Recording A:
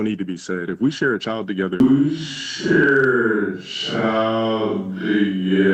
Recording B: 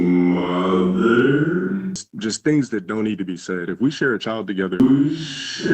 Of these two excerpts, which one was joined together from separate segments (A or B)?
B